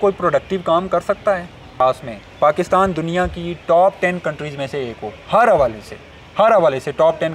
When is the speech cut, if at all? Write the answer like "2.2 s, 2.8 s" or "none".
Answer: 1.8 s